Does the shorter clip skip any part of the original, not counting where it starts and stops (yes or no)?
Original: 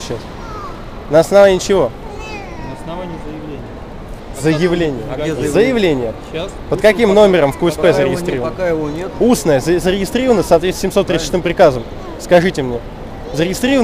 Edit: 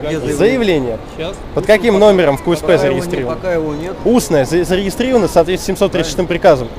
no